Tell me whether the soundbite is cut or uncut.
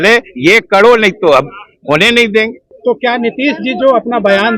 cut